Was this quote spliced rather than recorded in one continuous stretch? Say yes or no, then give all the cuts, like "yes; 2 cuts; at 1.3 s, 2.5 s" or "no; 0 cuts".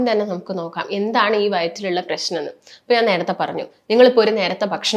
no; 0 cuts